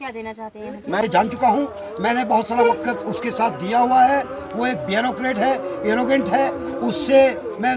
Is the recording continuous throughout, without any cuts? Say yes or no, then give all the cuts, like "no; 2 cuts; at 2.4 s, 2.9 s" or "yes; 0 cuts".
no; 1 cut; at 1.0 s